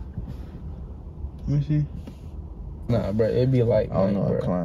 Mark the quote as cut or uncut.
cut